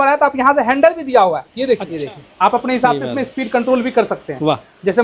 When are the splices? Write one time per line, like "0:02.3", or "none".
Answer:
0:01.9